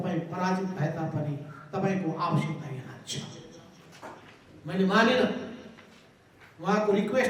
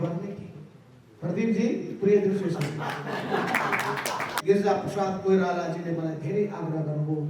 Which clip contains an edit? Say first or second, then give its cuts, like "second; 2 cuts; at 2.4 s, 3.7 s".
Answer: second; 1 cut; at 4.3 s